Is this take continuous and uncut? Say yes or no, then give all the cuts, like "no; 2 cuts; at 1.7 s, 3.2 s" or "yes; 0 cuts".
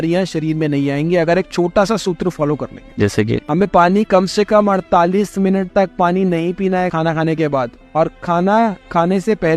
yes; 0 cuts